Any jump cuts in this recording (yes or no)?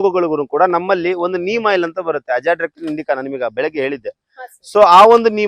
no